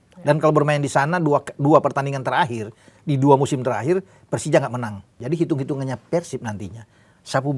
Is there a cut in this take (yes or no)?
yes